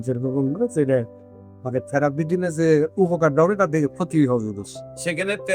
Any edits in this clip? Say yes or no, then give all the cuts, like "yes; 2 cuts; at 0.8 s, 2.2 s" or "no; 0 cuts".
no; 0 cuts